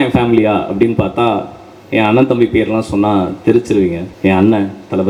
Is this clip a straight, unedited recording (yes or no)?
yes